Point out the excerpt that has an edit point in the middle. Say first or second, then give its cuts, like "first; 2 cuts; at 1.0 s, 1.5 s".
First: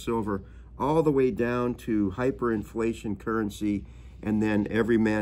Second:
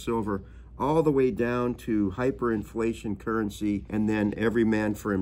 second; 1 cut; at 3.9 s